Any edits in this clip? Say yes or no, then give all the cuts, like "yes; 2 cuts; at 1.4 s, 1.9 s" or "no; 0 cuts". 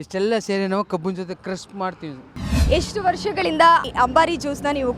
yes; 1 cut; at 2.5 s